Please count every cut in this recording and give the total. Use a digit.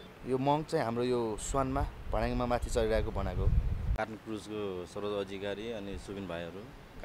1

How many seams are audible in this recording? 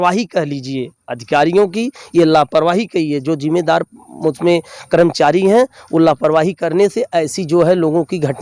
0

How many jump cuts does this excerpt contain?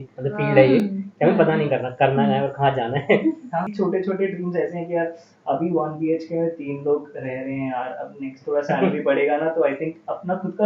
1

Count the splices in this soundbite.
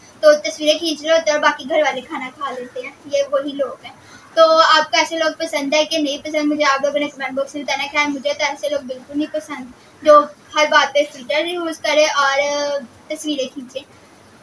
0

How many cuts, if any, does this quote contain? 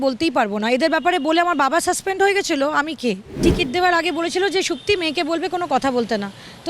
1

